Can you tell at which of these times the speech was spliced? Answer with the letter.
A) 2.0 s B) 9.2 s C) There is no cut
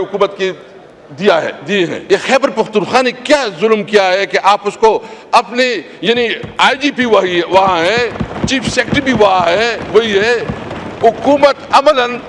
A